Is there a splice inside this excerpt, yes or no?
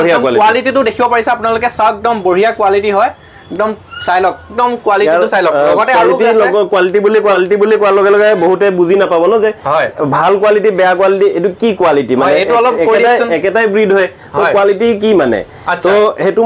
no